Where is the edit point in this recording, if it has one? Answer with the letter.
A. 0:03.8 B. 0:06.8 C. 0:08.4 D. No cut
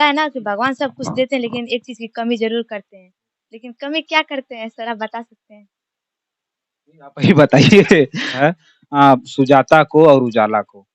C